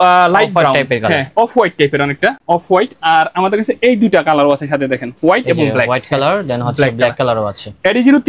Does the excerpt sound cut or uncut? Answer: uncut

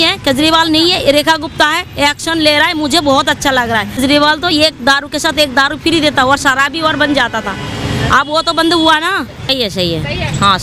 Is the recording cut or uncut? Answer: cut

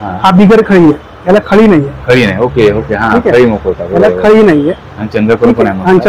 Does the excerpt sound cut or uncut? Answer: uncut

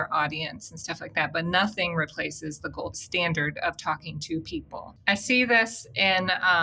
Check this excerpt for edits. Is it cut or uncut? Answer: cut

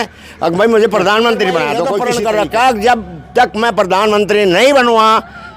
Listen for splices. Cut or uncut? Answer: cut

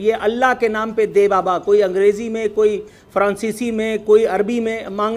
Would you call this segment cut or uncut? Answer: uncut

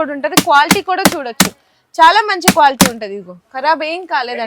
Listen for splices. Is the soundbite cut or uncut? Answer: uncut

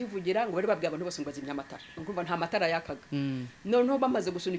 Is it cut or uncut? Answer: uncut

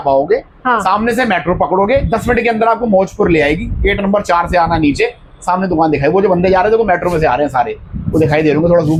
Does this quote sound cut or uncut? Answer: uncut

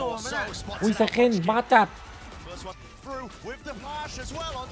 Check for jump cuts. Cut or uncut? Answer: cut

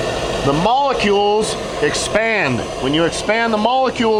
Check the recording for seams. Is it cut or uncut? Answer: uncut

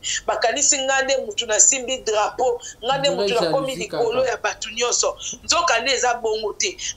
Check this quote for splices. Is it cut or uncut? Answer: uncut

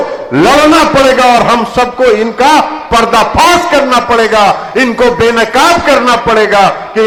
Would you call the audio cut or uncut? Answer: uncut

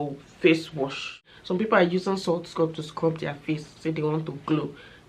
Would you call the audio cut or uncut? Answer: cut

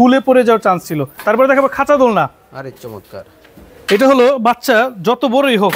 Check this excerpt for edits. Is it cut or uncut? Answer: cut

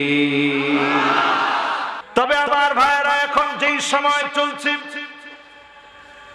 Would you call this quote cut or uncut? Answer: cut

